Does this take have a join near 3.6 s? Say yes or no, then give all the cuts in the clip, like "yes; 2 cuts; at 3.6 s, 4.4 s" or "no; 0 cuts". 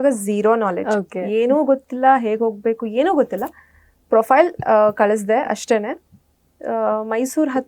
no; 0 cuts